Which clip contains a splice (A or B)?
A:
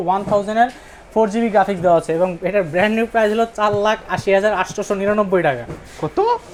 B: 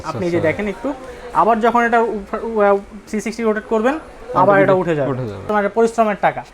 B